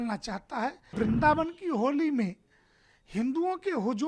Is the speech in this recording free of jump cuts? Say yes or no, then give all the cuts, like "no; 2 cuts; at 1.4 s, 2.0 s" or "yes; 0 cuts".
no; 1 cut; at 0.9 s